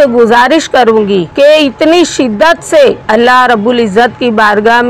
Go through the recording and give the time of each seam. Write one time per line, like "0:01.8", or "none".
0:01.3
0:03.0